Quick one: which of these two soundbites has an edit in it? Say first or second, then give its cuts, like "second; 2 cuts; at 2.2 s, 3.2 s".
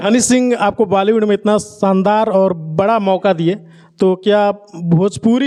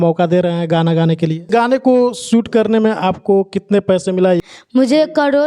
second; 2 cuts; at 1.4 s, 4.4 s